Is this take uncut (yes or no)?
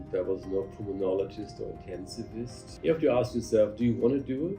no